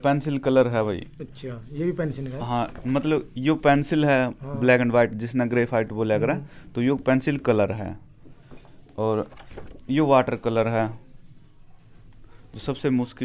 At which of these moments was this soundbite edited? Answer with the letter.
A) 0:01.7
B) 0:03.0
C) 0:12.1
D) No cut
D